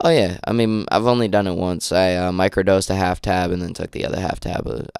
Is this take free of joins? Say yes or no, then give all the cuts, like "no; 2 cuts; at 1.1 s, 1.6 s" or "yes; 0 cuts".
yes; 0 cuts